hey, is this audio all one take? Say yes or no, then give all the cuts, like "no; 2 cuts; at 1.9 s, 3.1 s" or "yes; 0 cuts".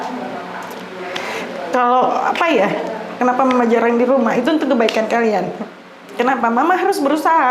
yes; 0 cuts